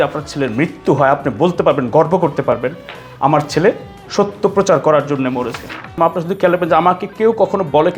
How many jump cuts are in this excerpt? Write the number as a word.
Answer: one